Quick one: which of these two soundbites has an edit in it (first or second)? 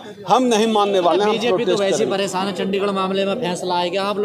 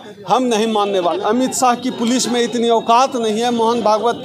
second